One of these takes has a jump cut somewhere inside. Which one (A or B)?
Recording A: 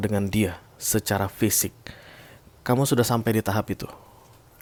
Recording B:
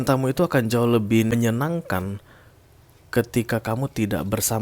B